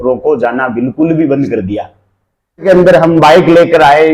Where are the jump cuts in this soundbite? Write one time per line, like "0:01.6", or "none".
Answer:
0:02.6